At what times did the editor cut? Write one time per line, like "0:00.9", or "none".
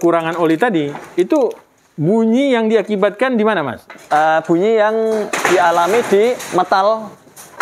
none